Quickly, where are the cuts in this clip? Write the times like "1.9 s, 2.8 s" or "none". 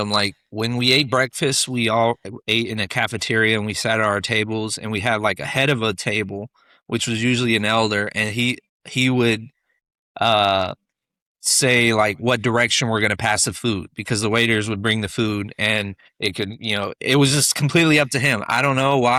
none